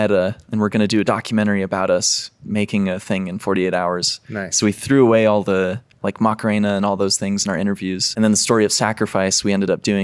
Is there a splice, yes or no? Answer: yes